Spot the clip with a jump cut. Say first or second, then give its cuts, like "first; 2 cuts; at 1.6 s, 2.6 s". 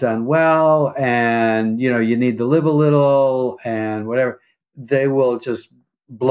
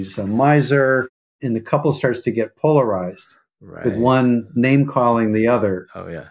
second; 1 cut; at 1.4 s